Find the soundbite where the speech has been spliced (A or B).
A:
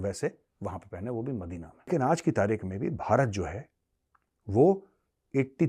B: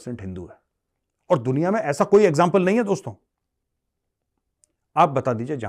A